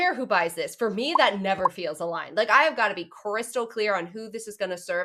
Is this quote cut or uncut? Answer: uncut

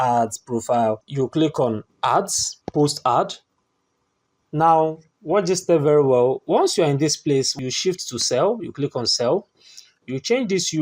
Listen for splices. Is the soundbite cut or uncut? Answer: cut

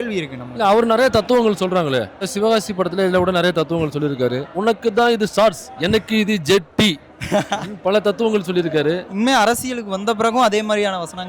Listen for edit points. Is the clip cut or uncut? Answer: cut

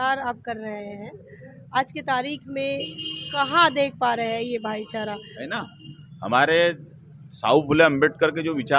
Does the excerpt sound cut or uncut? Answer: uncut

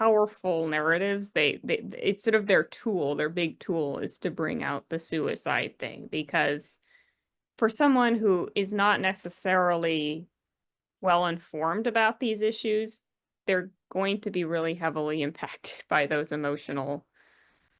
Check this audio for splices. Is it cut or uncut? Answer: uncut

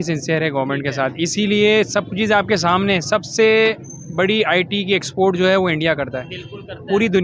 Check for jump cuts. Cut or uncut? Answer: uncut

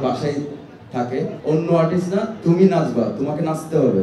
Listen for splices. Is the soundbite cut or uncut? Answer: cut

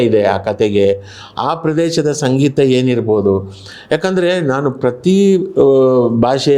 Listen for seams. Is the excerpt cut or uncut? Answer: uncut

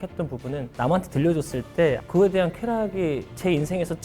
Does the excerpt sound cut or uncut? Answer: cut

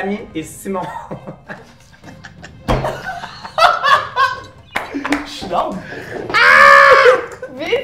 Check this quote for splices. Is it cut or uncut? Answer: uncut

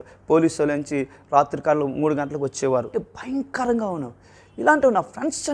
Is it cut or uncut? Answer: cut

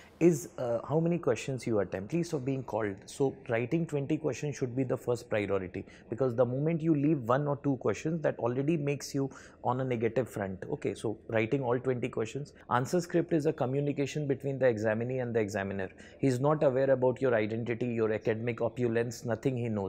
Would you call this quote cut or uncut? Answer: cut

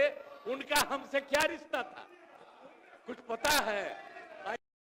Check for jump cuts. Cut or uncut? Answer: uncut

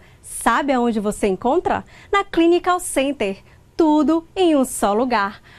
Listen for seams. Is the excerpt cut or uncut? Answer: uncut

